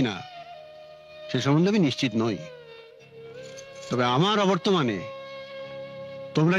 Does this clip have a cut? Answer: no; 0 cuts

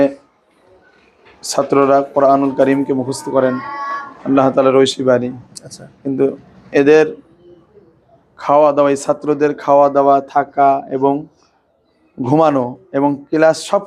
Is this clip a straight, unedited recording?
yes; 0 cuts

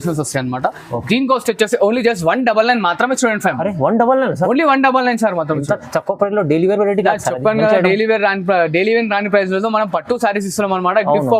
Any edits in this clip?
no; 0 cuts

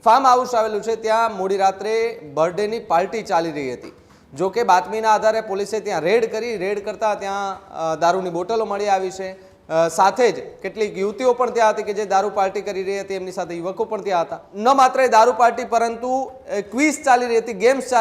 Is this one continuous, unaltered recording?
no; 1 cut; at 14.4 s

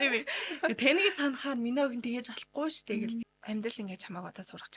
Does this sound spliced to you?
yes; 1 cut; at 3.3 s

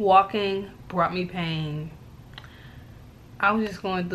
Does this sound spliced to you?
yes; 1 cut; at 2.1 s

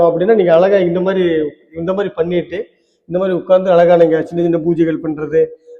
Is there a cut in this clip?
no; 0 cuts

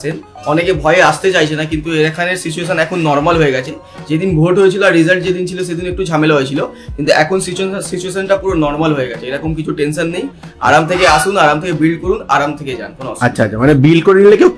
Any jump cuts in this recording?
no; 0 cuts

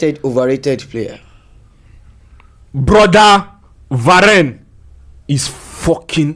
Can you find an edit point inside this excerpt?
no; 0 cuts

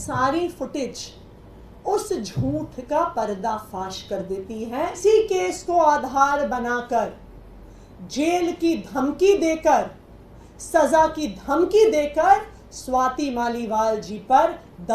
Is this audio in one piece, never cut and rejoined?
no; 1 cut; at 5.0 s

